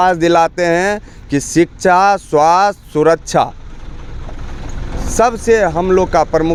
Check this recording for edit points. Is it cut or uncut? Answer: uncut